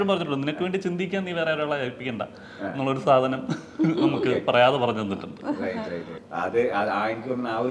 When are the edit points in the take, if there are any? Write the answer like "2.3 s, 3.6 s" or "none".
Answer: none